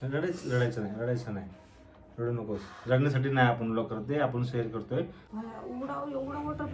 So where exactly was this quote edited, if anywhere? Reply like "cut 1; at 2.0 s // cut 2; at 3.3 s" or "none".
cut 1; at 5.2 s